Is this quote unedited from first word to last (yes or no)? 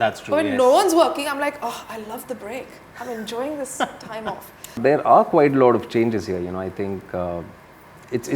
no